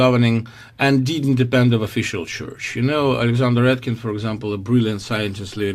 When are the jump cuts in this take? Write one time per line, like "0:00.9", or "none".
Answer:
0:01.0